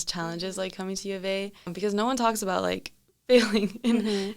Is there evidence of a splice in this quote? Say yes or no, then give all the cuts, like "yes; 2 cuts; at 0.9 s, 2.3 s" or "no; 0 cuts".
yes; 1 cut; at 1.7 s